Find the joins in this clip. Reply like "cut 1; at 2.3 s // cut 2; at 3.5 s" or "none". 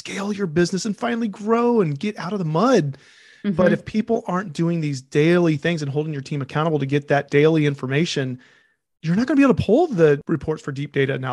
cut 1; at 10.2 s